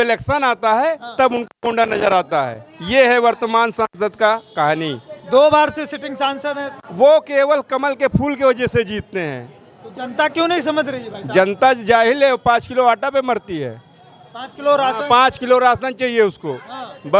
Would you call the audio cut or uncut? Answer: uncut